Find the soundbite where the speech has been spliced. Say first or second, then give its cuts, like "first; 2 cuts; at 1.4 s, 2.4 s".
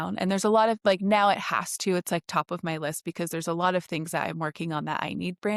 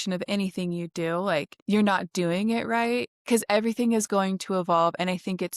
second; 2 cuts; at 1.5 s, 3.1 s